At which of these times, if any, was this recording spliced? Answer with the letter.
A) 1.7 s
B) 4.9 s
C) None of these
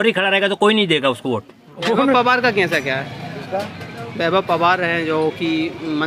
A